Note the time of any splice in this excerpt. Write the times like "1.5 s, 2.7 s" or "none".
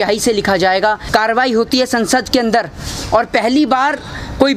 1.0 s